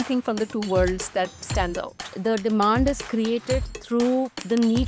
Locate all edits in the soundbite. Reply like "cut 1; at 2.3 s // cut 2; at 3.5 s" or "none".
cut 1; at 2.2 s

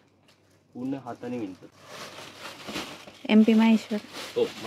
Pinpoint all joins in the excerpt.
none

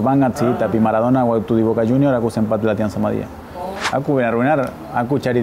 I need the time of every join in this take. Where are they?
cut 1; at 3.5 s

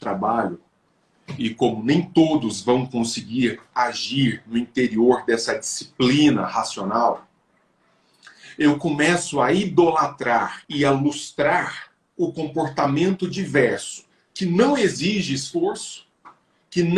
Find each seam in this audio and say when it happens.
cut 1; at 10.6 s

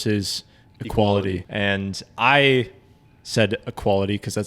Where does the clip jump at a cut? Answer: cut 1; at 1.5 s

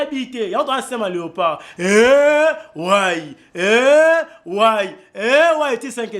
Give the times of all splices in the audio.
none

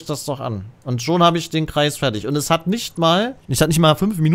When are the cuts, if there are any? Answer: cut 1; at 3.4 s

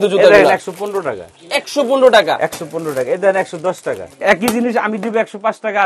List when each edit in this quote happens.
cut 1; at 4.2 s

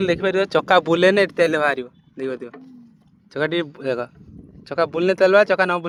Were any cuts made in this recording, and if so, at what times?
none

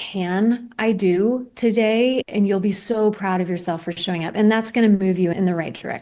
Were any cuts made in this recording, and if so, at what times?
none

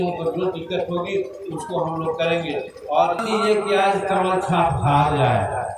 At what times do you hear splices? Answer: cut 1; at 3.2 s

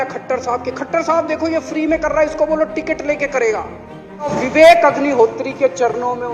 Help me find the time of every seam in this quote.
cut 1; at 4.4 s

